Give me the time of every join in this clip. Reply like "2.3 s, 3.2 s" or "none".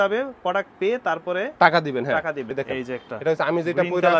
2.5 s